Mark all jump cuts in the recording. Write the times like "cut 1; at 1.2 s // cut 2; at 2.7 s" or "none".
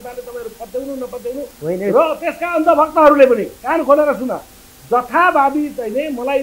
none